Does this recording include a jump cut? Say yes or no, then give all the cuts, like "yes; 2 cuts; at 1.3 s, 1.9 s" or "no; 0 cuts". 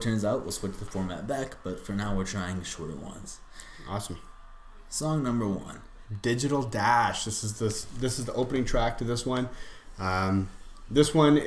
yes; 1 cut; at 4.2 s